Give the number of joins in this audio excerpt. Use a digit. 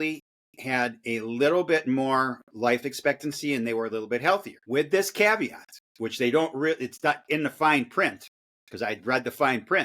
1